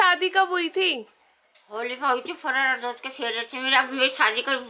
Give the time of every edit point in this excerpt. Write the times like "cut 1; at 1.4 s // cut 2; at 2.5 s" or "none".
none